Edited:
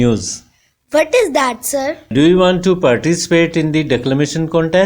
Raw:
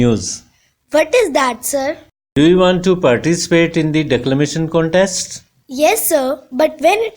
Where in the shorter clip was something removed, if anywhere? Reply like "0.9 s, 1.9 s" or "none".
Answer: 2.0 s